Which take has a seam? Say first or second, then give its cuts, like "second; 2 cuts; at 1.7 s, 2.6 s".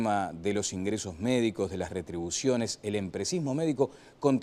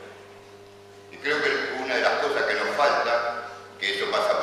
second; 1 cut; at 3.2 s